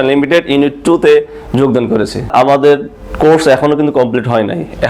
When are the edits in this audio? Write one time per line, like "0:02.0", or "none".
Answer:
0:02.3